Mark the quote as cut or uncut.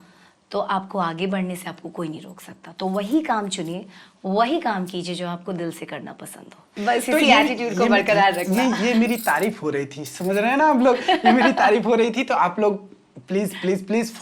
cut